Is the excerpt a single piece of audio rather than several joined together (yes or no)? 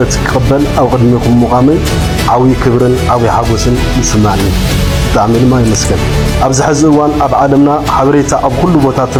yes